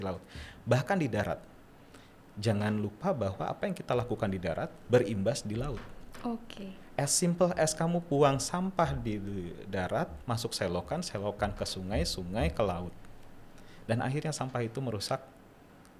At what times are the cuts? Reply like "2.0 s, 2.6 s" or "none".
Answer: none